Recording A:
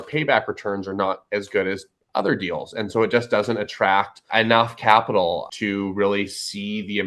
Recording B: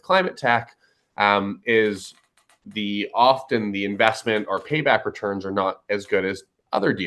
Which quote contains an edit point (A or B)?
A